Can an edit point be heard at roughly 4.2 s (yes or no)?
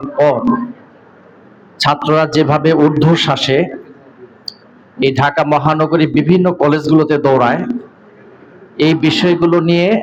no